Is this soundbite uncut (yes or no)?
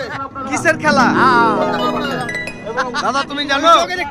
yes